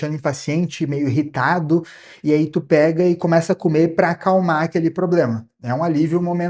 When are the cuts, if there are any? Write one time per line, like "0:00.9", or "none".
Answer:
none

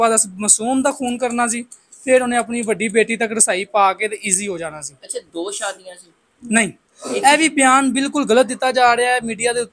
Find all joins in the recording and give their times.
none

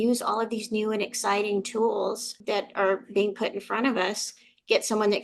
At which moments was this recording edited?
0:02.3

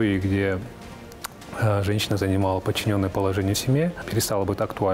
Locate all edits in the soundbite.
0:04.1

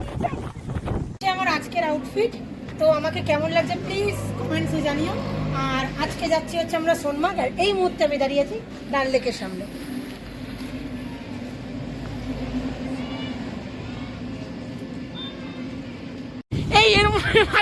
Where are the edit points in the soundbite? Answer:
0:01.1
0:16.4

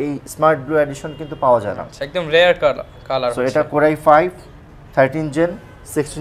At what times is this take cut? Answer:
none

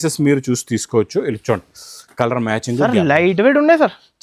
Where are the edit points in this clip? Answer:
none

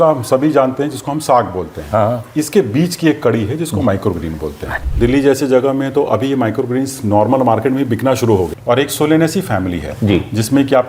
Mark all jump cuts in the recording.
0:04.8
0:08.5

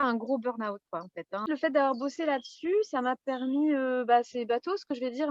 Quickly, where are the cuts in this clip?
0:01.5

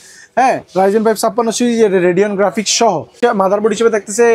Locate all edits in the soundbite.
0:03.1

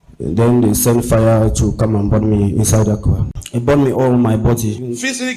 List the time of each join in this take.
0:03.2

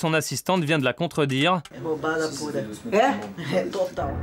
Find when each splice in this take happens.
0:01.7

